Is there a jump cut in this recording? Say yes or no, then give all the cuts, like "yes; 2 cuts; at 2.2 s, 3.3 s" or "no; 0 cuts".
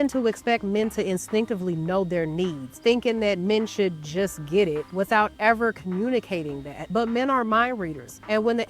yes; 1 cut; at 2.7 s